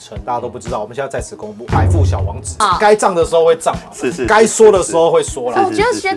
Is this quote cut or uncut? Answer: cut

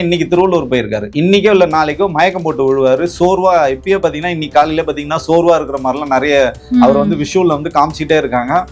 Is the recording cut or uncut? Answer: uncut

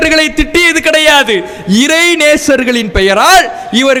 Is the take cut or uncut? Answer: uncut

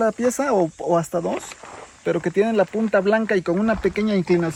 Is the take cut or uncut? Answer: uncut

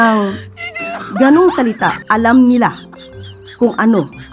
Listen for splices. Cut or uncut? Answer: cut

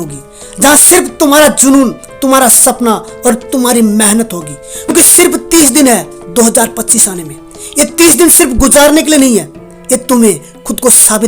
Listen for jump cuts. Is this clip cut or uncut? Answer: cut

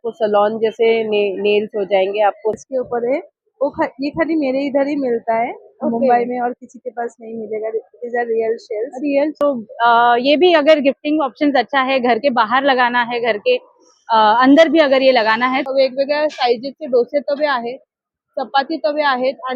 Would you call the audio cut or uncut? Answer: cut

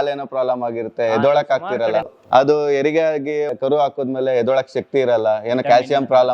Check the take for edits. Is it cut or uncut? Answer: cut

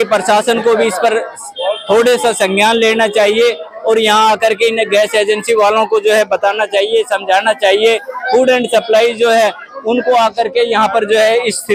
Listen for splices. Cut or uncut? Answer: uncut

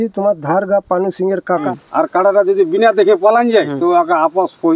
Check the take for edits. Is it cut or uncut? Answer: cut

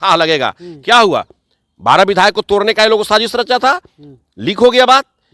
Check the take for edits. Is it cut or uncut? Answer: uncut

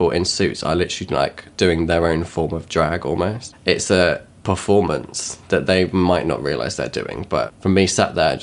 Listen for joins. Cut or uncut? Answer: cut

